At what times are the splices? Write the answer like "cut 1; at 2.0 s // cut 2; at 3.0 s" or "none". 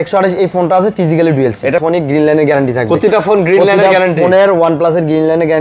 cut 1; at 1.8 s